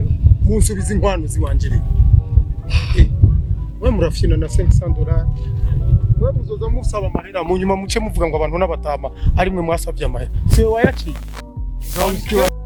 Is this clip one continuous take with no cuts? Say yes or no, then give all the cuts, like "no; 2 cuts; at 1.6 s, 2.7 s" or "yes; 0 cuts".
yes; 0 cuts